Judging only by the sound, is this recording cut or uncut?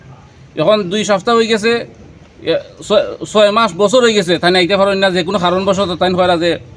uncut